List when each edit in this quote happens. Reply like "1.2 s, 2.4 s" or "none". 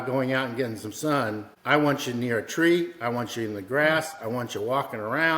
1.5 s